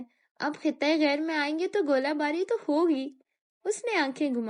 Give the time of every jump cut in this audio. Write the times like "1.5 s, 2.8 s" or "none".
none